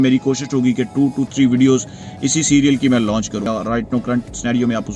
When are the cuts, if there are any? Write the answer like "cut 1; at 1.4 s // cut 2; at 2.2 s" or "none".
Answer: cut 1; at 3.5 s